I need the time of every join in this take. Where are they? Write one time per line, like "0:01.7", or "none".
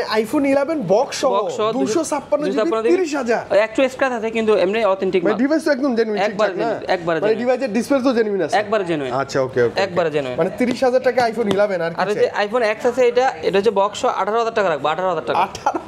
none